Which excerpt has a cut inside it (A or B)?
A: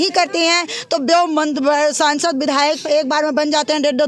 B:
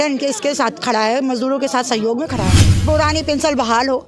B